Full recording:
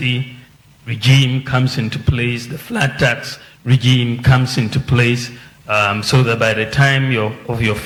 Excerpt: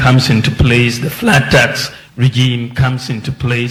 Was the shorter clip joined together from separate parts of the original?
no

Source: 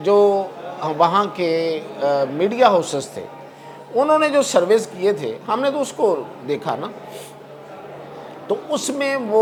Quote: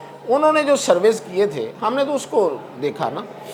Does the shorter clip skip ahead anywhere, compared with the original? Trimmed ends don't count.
no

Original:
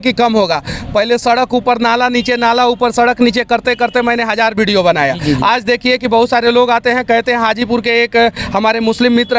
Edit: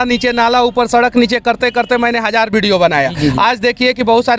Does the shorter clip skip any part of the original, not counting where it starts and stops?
no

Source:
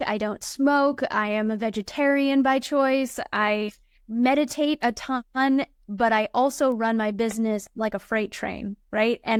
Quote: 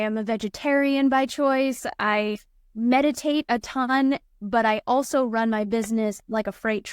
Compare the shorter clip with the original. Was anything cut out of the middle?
yes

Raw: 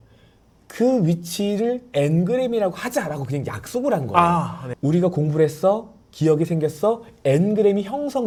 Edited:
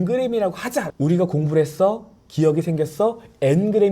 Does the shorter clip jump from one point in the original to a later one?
yes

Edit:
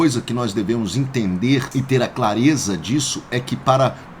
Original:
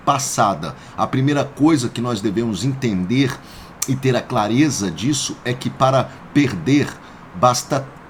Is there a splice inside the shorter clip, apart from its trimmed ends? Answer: yes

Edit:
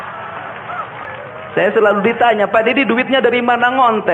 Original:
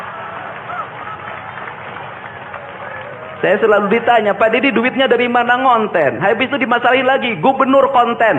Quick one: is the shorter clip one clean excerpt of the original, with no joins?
no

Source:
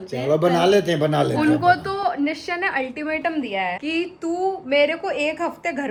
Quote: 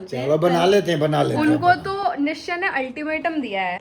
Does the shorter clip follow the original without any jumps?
yes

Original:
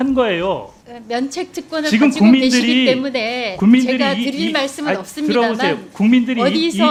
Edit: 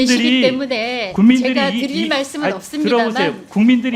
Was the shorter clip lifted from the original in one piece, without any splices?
yes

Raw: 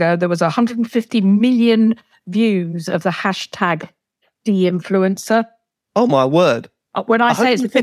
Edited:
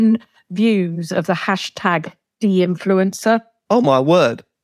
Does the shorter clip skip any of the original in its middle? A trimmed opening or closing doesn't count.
yes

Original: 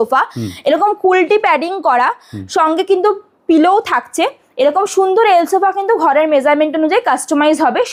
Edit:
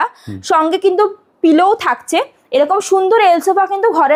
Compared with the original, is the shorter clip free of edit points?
yes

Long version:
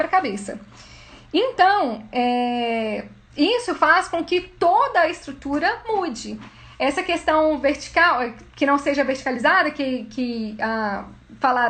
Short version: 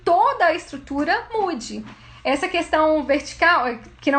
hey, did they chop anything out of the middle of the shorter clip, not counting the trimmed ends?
no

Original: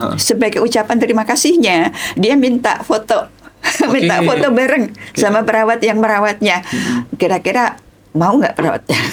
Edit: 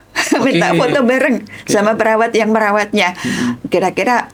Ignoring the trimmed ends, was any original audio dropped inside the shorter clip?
no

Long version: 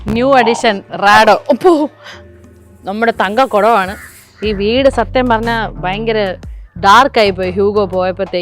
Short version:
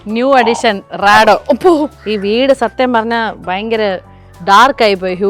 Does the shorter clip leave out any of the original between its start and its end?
yes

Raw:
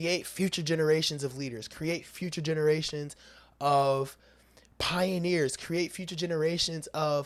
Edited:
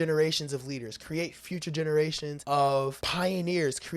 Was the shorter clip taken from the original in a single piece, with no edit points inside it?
no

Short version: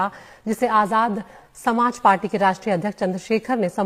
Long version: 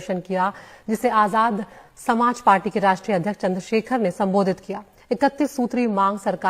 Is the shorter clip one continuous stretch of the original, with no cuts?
yes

